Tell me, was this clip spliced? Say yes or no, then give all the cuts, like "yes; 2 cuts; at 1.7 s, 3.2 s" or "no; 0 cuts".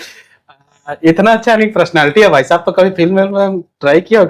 no; 0 cuts